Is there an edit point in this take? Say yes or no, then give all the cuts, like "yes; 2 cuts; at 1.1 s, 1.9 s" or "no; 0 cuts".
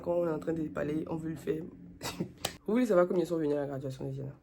yes; 1 cut; at 2.5 s